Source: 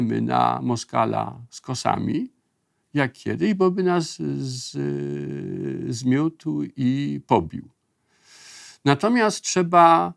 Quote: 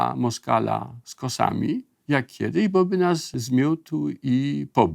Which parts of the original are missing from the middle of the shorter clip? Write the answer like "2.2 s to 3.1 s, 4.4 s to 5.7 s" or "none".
2.4 s to 2.8 s, 4.1 s to 5.8 s